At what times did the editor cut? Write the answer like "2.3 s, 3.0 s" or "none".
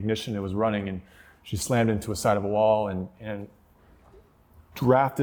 none